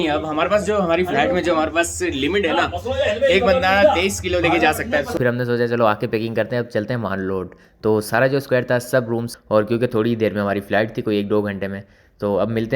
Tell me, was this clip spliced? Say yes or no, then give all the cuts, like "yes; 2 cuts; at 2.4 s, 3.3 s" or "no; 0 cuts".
yes; 2 cuts; at 5.1 s, 9.3 s